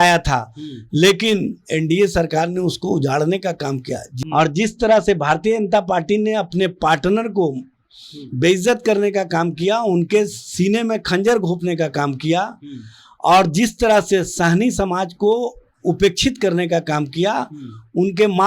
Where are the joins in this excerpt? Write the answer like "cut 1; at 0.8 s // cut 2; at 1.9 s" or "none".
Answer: cut 1; at 4.1 s